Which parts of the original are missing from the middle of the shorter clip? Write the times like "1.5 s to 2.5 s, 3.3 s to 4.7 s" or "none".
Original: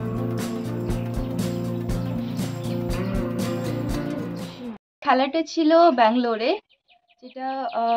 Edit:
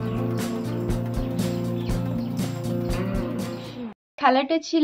3.7 s to 4.5 s